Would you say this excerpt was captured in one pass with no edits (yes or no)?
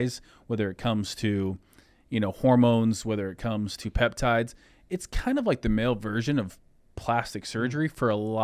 yes